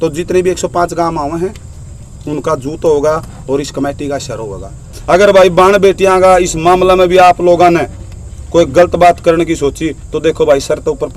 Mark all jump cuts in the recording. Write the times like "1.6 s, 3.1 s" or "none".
4.9 s